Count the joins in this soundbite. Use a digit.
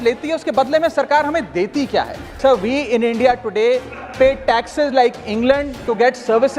1